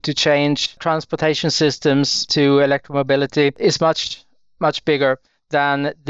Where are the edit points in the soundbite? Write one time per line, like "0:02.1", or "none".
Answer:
0:00.8
0:02.2
0:03.6